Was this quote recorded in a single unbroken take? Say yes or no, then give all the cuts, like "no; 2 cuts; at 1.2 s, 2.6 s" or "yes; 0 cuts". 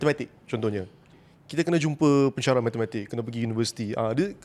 yes; 0 cuts